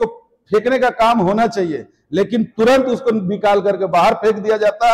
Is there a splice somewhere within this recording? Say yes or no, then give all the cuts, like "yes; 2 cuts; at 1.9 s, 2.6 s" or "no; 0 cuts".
no; 0 cuts